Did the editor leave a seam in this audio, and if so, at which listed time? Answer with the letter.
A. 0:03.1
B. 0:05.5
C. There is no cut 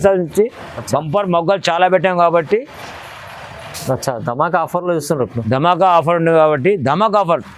C